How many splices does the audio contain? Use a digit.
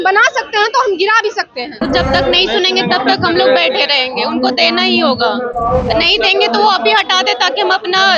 1